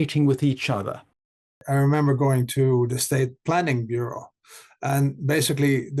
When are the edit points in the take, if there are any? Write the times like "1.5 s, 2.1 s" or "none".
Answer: 1.6 s, 2.9 s